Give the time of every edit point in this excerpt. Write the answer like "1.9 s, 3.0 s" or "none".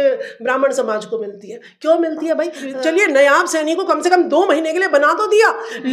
2.6 s